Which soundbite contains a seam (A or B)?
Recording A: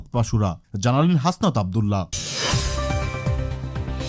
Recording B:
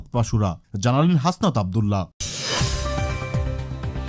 A